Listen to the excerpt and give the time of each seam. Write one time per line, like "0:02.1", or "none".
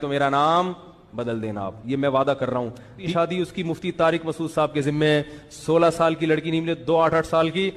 0:03.0